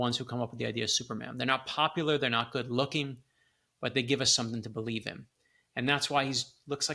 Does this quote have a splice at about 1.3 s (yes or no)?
no